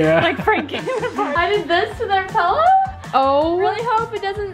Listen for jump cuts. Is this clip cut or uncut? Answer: cut